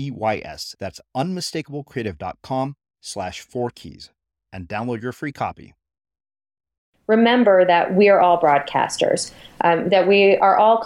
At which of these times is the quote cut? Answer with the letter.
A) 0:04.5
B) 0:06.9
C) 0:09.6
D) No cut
B